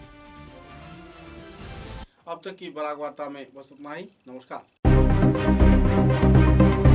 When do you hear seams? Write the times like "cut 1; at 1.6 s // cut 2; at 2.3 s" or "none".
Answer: none